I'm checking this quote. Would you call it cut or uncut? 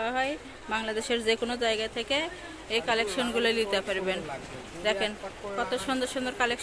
uncut